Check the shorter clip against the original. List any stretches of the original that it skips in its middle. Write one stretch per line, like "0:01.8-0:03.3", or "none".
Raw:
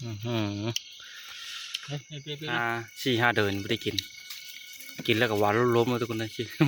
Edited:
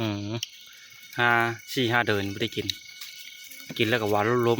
0:01.5-0:02.5

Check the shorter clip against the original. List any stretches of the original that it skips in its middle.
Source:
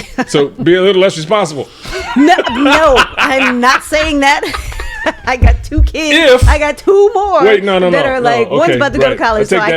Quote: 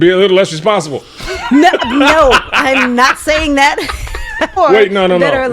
0:05.2-0:07.3

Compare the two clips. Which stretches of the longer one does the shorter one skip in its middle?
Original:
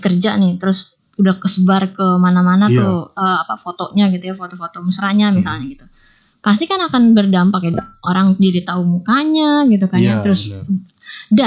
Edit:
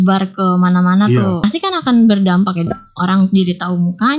0:03.0-0:06.5

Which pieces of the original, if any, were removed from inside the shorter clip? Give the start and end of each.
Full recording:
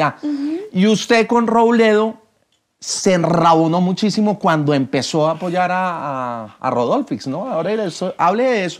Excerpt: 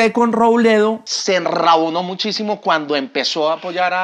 0:02.2-0:02.9

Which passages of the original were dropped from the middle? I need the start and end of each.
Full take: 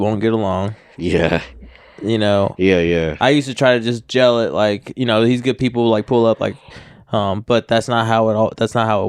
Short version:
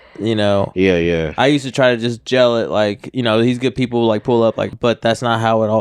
0:06.6-0:07.4

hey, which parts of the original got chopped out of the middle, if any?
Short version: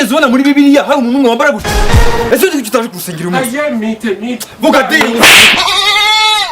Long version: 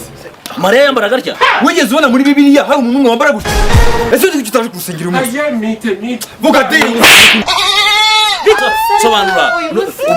0:07.3-0:07.4

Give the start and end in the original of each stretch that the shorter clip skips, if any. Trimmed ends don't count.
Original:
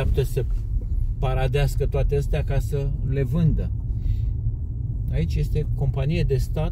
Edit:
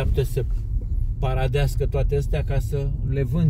none

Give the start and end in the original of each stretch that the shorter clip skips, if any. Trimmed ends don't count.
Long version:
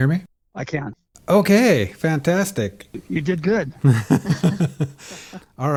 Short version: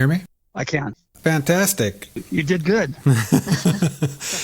0:01.1-0:01.9

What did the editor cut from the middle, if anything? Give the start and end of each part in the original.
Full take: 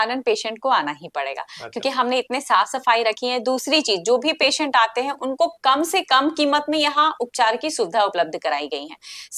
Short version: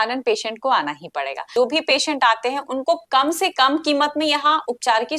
0:01.5-0:04.0

